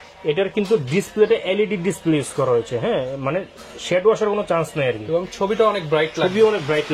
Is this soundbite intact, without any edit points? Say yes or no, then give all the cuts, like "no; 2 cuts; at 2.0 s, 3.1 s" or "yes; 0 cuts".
yes; 0 cuts